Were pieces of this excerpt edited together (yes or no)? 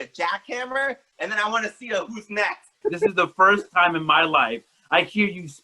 yes